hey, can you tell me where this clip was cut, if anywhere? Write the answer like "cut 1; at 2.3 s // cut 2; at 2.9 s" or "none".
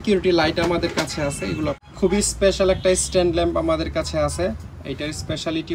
cut 1; at 1.8 s